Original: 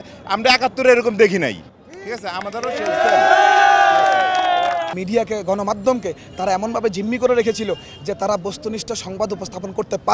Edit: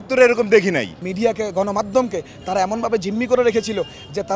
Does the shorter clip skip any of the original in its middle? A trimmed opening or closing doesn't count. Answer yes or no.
yes